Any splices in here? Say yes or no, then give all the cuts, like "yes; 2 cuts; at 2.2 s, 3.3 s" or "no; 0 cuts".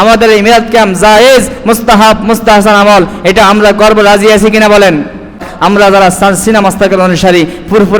yes; 1 cut; at 5.5 s